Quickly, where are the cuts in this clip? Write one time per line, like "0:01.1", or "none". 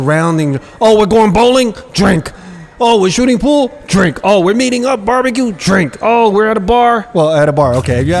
none